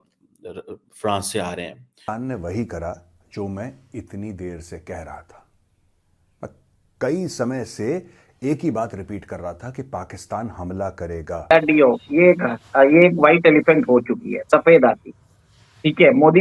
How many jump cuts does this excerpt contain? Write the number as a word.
two